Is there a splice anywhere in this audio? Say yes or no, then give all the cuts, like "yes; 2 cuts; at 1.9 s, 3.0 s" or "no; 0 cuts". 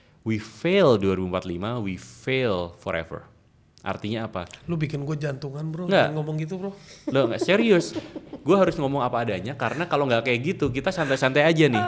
no; 0 cuts